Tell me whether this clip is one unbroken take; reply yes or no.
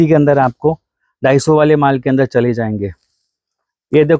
yes